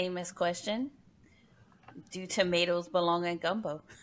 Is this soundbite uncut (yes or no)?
yes